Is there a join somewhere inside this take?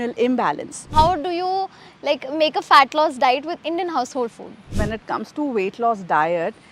yes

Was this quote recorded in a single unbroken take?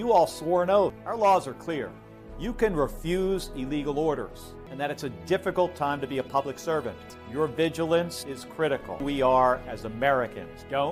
no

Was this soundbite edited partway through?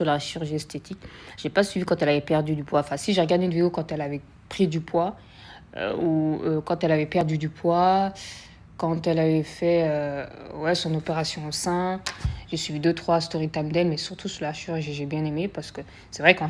no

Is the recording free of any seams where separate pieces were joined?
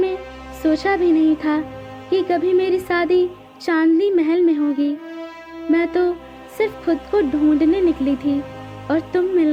yes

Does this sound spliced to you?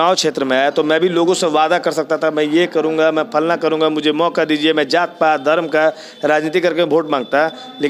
no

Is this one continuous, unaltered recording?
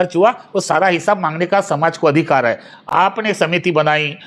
yes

